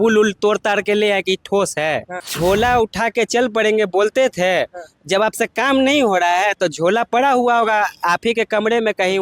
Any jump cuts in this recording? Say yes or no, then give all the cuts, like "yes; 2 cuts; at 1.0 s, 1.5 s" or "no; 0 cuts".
yes; 1 cut; at 2.2 s